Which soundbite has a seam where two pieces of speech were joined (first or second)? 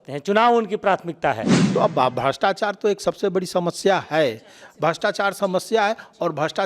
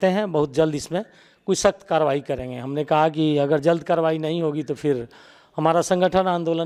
first